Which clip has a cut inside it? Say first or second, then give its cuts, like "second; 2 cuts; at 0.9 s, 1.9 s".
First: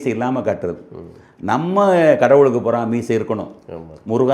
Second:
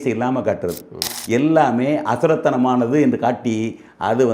second; 1 cut; at 1.1 s